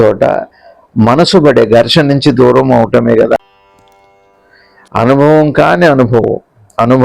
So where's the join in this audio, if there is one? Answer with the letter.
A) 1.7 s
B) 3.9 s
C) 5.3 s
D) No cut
B